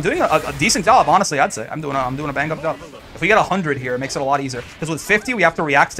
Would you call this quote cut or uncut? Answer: cut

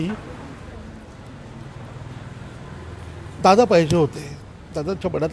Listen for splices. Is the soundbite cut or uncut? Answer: uncut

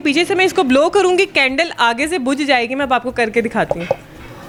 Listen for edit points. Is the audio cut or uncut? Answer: uncut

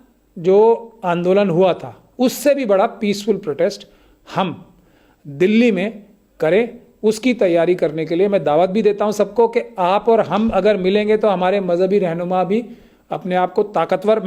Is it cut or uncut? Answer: uncut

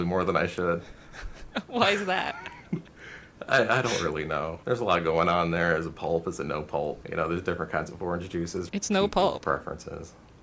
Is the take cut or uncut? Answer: cut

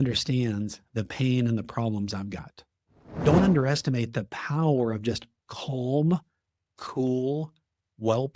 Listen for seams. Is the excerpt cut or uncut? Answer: cut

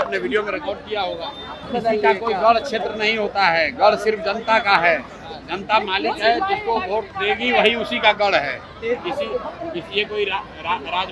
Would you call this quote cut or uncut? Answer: cut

